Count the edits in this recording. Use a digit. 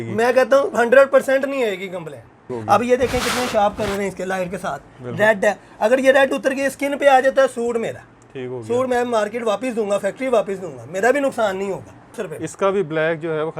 2